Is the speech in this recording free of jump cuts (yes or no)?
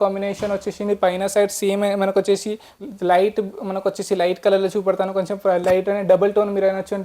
no